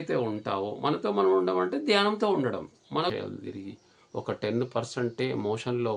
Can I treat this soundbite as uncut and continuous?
no; 1 cut; at 3.1 s

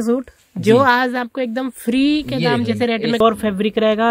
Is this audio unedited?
no; 1 cut; at 3.2 s

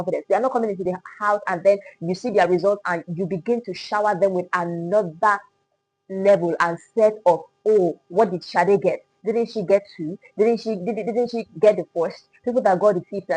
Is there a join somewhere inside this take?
no; 0 cuts

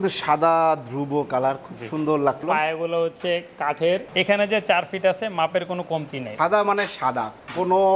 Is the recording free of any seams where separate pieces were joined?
no; 3 cuts; at 2.4 s, 4.1 s, 6.2 s

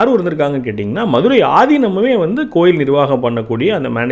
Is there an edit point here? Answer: no; 0 cuts

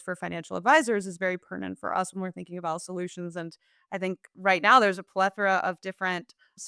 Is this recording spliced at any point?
no; 0 cuts

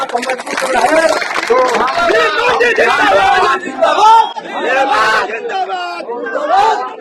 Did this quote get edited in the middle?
no; 0 cuts

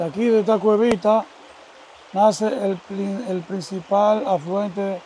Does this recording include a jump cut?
no; 0 cuts

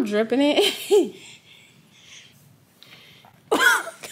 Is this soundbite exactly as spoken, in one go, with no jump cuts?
no; 1 cut; at 2.3 s

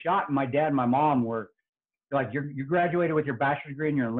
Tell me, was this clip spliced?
no; 0 cuts

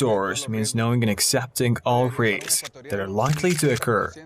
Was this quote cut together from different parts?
yes; 1 cut; at 3.3 s

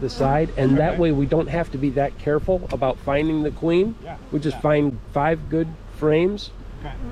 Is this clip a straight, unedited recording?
yes; 0 cuts

